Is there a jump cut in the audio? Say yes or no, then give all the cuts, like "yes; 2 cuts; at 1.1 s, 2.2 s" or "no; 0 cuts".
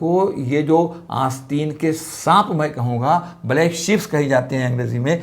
no; 0 cuts